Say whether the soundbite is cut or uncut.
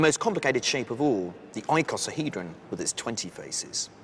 cut